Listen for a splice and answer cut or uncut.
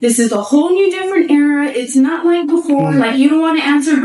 uncut